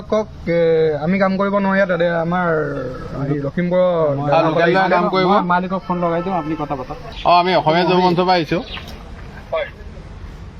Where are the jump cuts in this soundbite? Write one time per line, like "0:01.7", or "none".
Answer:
0:07.1

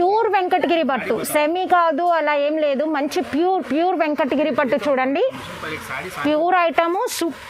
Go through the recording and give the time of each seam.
none

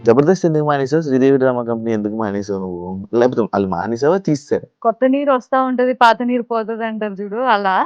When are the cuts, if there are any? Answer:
0:04.7

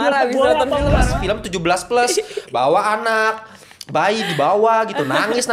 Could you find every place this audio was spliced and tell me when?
0:01.1

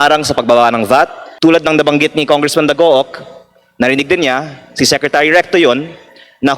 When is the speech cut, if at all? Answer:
0:01.2

